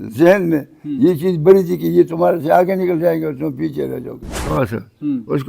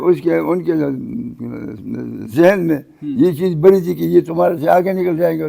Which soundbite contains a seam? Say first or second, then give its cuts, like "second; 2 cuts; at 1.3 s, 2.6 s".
first; 1 cut; at 4.4 s